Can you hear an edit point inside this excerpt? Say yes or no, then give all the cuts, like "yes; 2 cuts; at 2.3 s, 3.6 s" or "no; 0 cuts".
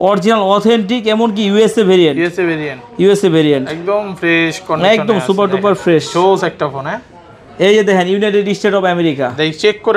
no; 0 cuts